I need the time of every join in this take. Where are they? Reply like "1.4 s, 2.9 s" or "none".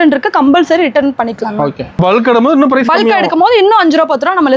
2.0 s